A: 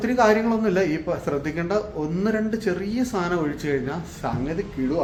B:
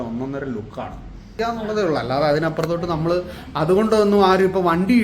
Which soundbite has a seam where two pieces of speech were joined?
B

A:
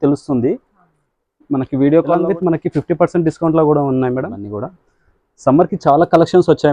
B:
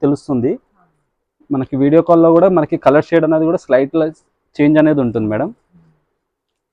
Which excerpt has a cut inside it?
A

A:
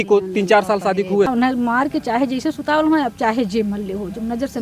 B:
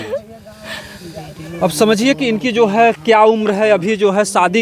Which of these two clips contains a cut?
A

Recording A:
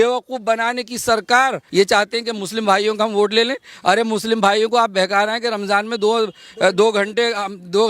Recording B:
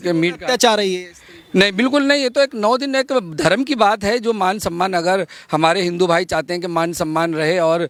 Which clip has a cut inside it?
A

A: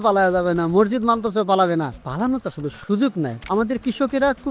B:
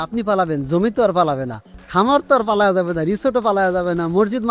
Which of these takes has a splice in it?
A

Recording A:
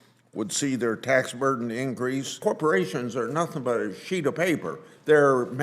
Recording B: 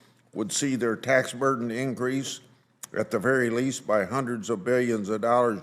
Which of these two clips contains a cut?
A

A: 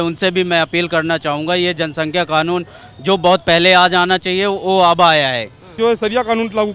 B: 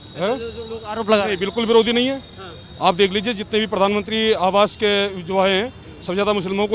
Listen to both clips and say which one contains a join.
A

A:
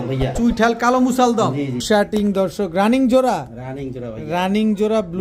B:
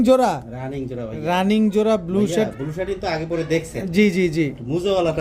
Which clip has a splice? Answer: A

